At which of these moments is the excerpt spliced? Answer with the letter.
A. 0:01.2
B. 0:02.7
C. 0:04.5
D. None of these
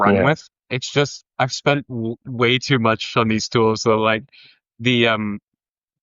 A